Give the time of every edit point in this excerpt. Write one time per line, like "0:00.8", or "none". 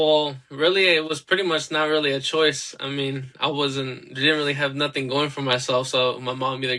none